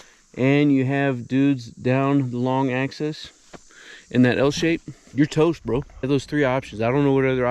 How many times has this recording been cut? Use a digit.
2